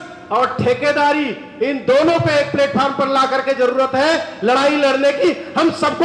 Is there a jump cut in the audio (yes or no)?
no